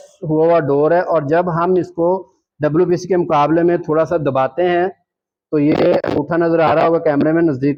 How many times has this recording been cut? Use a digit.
0